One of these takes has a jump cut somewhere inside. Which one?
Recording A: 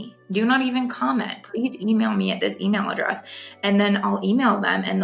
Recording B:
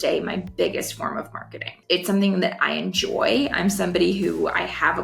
B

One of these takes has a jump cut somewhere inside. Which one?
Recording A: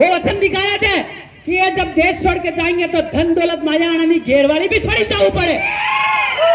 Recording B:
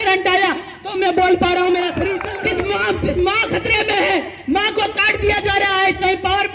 B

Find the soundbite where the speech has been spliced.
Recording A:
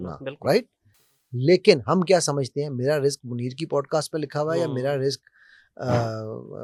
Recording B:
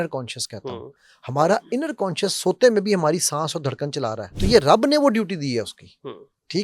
B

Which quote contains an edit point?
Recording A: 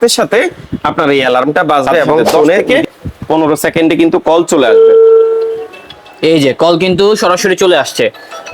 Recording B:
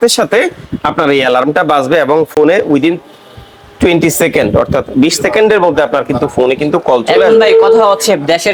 A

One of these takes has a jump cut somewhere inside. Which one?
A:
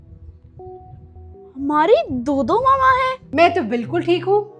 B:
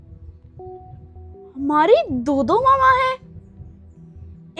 A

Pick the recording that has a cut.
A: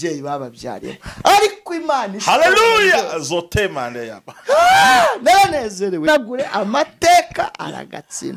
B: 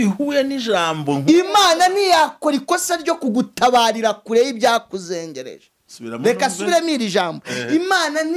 A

